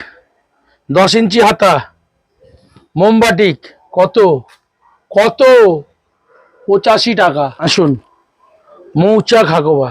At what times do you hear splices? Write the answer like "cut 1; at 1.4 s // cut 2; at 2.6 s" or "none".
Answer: cut 1; at 7.6 s